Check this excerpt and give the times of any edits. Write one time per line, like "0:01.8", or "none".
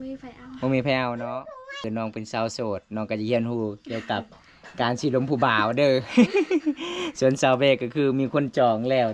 0:01.8